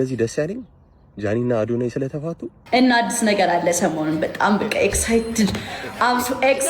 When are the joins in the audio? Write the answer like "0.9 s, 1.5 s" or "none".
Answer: 2.5 s